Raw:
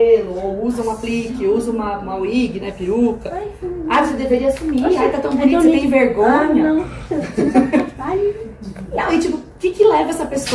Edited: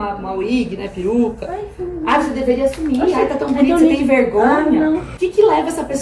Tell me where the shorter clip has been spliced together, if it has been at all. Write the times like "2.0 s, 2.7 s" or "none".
5.1 s